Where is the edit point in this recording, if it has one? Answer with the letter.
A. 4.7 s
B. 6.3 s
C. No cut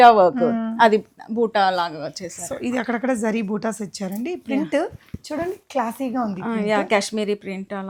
C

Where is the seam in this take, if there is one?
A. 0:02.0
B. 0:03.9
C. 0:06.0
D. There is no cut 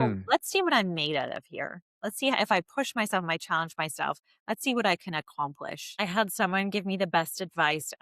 C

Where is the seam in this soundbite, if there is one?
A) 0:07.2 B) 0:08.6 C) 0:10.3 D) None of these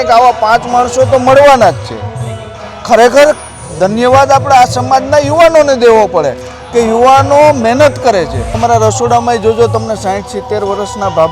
B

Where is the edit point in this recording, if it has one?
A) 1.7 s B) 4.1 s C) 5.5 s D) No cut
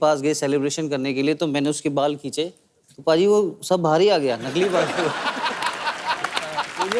D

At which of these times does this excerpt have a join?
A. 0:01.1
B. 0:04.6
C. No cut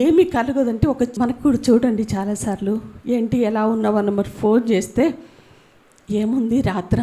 A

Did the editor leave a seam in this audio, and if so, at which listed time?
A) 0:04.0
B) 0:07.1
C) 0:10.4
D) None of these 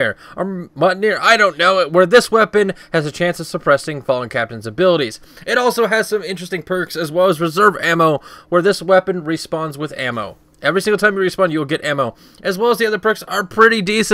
A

